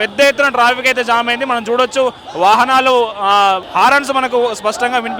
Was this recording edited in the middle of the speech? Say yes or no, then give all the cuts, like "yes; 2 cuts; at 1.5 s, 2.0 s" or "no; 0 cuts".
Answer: yes; 1 cut; at 3.7 s